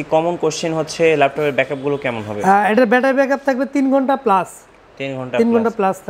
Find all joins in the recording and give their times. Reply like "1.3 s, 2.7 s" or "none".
none